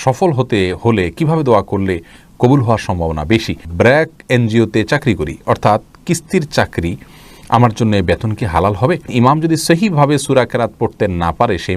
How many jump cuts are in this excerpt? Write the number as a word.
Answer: two